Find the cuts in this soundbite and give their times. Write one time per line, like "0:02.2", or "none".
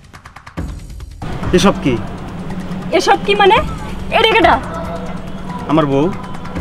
0:01.4